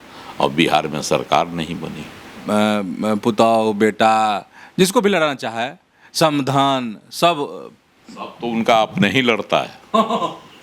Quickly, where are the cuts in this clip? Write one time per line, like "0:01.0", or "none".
0:02.4